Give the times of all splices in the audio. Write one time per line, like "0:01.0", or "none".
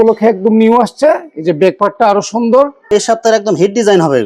0:02.9